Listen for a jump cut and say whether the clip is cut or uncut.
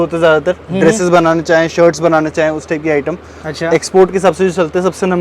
uncut